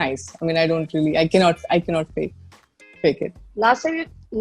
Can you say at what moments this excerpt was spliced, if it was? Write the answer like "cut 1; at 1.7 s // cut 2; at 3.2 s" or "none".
none

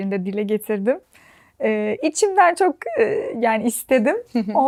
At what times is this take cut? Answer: none

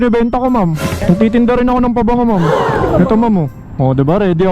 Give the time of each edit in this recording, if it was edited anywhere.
cut 1; at 0.9 s // cut 2; at 2.8 s

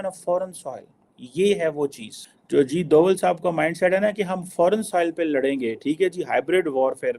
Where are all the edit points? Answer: none

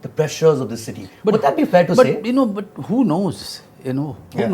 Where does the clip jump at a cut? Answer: none

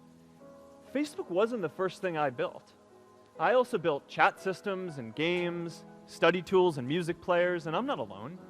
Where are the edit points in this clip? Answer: cut 1; at 0.9 s

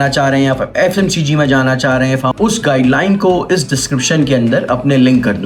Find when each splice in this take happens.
cut 1; at 2.3 s

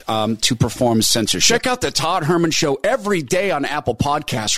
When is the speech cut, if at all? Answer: cut 1; at 1.4 s

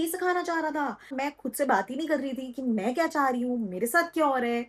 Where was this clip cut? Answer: cut 1; at 1.1 s

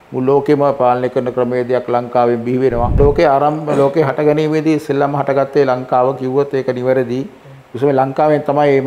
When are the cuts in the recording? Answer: cut 1; at 3.0 s

